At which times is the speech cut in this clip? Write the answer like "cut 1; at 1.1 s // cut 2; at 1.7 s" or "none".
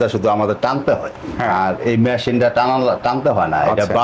cut 1; at 1.5 s